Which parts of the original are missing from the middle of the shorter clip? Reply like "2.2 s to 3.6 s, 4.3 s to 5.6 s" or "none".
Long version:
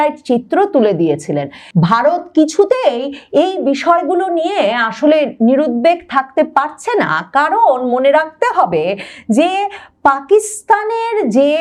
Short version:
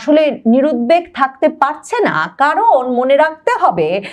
none